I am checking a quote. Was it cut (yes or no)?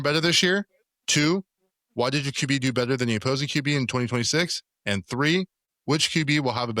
yes